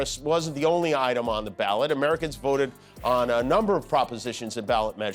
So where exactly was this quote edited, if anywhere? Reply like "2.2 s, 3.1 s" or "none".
none